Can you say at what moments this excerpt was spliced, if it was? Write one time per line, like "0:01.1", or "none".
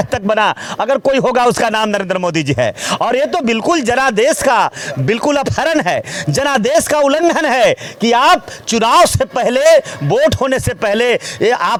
none

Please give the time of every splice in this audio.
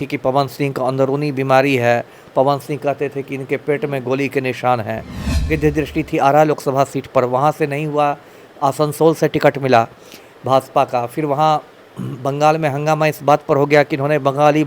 0:05.4

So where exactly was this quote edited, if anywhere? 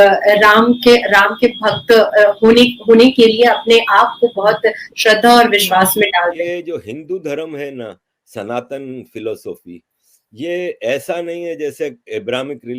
0:06.4

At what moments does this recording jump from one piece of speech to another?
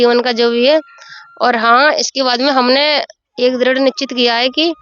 none

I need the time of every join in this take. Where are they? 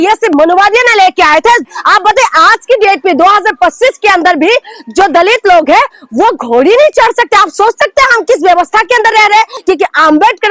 0:01.7
0:09.5

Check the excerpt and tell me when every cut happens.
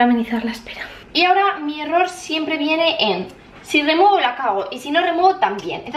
0:01.0

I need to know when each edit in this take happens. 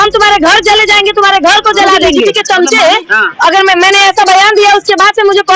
0:02.1

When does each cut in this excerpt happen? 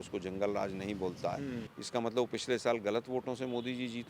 0:01.7

